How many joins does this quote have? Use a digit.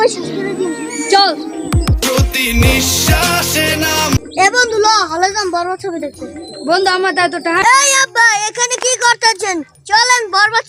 2